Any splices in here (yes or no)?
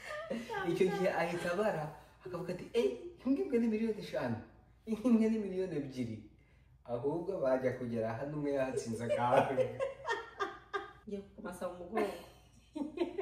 yes